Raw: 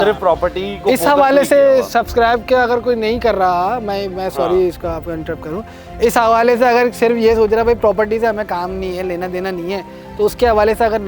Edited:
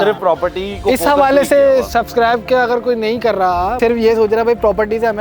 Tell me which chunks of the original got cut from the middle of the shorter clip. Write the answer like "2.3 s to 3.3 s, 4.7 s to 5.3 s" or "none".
3.8 s to 7.0 s